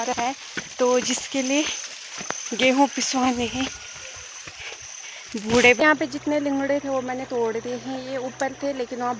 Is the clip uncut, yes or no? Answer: no